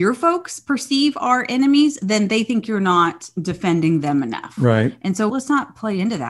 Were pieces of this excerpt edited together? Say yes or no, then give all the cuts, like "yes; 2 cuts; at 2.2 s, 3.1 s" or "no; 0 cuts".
yes; 1 cut; at 5.3 s